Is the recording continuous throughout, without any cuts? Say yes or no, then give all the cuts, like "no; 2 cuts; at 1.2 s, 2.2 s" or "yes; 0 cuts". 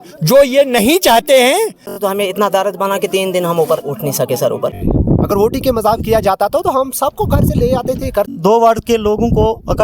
no; 3 cuts; at 1.9 s, 4.8 s, 8.3 s